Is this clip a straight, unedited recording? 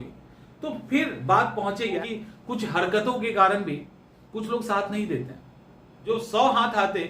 no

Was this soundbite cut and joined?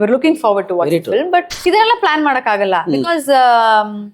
yes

